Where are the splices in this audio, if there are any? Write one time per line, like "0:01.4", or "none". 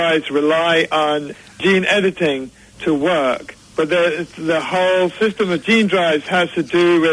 0:01.5